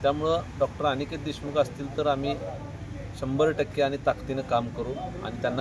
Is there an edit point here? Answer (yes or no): no